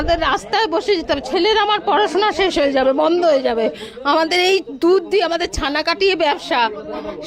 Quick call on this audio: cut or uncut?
uncut